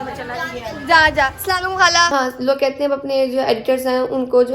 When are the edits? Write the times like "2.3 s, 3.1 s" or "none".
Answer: 2.1 s